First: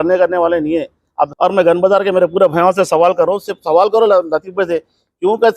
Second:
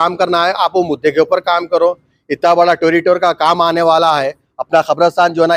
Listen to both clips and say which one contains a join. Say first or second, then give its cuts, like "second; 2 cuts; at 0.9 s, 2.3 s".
first; 1 cut; at 1.3 s